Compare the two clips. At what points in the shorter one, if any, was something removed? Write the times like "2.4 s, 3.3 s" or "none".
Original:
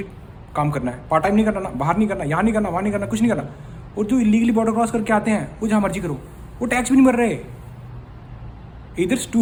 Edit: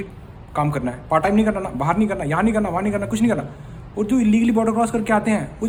none